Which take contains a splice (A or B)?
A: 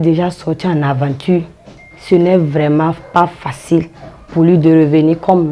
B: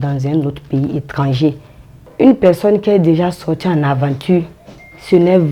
B